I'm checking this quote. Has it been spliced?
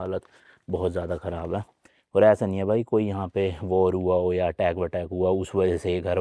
no; 0 cuts

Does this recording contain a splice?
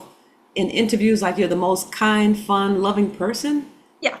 no; 0 cuts

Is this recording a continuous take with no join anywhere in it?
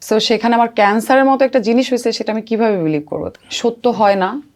no; 1 cut; at 3.2 s

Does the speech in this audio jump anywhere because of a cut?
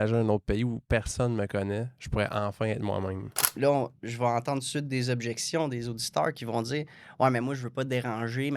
yes; 1 cut; at 3.3 s

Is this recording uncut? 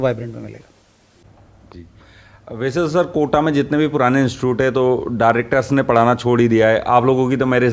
yes; 0 cuts

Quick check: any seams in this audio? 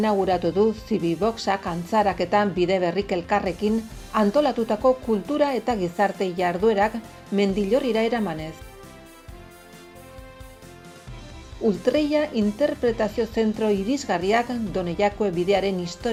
no; 0 cuts

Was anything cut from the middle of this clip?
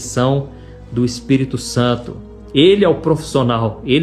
no; 0 cuts

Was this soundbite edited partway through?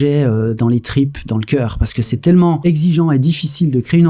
yes; 1 cut; at 2.6 s

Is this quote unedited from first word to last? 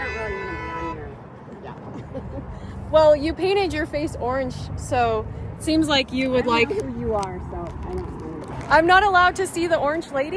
yes; 0 cuts

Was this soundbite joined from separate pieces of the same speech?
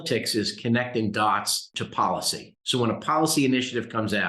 yes; 1 cut; at 1.8 s

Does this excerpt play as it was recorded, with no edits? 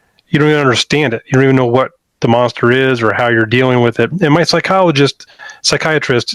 yes; 0 cuts

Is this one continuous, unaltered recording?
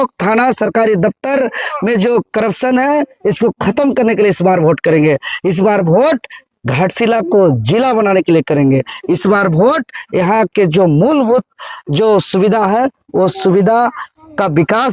yes; 0 cuts

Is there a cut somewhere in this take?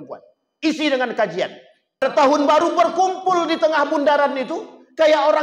yes; 1 cut; at 2.2 s

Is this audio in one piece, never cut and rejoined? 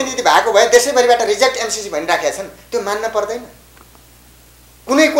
yes; 0 cuts

